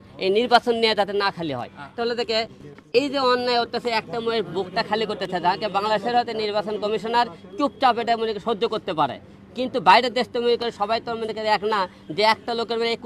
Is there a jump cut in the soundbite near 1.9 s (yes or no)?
yes